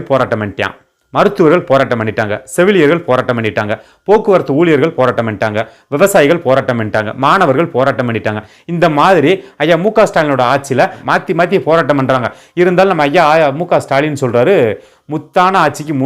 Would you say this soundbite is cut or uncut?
cut